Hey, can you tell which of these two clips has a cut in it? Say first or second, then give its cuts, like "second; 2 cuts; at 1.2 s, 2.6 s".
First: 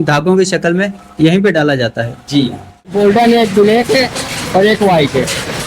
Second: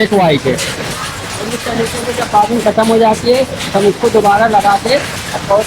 first; 1 cut; at 2.9 s